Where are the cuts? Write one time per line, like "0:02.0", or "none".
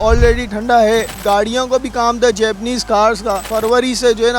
0:01.1
0:03.4